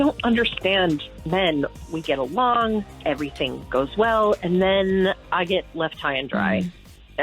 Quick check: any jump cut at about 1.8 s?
yes; 1 cut; at 1.8 s

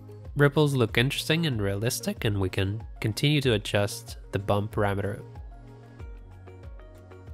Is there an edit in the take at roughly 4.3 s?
no; 0 cuts

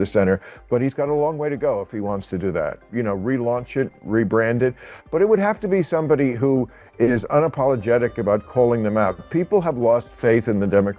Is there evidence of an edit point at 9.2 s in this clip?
no; 1 cut; at 2.8 s

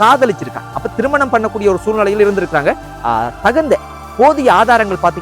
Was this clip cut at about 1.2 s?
no; 1 cut; at 2.9 s

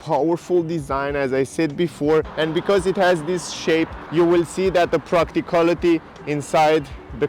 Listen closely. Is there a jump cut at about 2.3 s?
yes; 2 cuts; at 2.3 s, 4.0 s

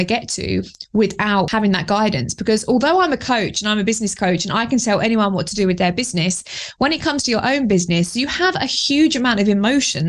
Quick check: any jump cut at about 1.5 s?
yes; 1 cut; at 1.5 s

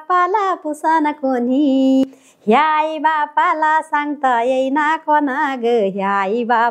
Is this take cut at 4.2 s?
no; 1 cut; at 2.0 s

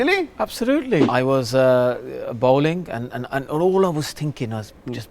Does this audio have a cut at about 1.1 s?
yes; 1 cut; at 1.1 s

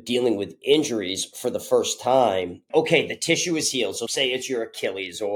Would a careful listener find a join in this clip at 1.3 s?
no; 2 cuts; at 2.6 s, 4.0 s

